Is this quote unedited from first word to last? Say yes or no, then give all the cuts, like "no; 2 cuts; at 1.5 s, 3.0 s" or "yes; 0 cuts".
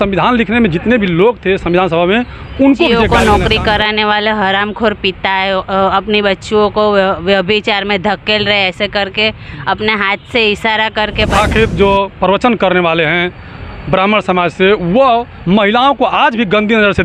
no; 2 cuts; at 3.0 s, 11.3 s